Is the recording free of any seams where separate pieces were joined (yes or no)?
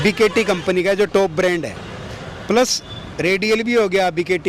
yes